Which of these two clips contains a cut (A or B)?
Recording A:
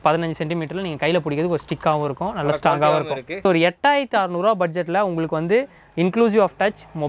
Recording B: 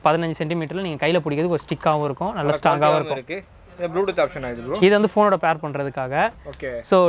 A